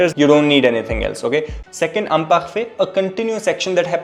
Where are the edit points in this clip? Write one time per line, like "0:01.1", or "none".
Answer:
0:01.6